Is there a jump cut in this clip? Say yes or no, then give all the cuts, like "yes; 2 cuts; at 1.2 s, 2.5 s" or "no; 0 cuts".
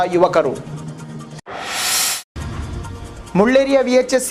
yes; 2 cuts; at 1.0 s, 3.2 s